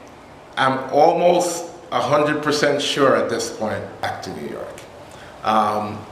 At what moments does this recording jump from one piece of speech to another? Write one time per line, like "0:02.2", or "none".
0:04.1